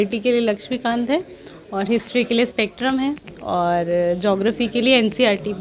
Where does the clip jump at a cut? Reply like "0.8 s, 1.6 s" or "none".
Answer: none